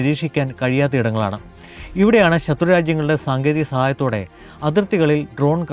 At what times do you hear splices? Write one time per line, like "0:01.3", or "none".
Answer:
none